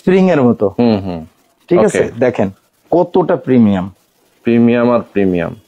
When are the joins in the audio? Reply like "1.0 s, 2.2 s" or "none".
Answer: none